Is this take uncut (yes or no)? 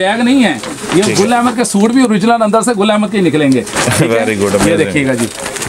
yes